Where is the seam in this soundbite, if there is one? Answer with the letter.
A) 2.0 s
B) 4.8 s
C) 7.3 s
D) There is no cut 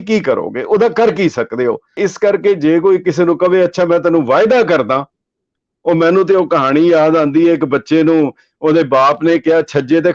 A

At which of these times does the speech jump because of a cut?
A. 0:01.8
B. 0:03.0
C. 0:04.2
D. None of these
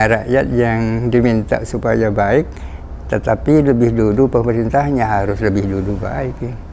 D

